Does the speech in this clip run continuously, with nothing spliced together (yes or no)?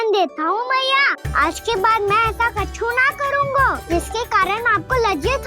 no